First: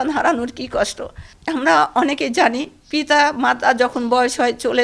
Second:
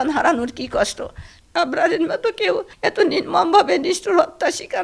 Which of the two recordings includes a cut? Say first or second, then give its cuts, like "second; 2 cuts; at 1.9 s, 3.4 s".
second; 1 cut; at 1.3 s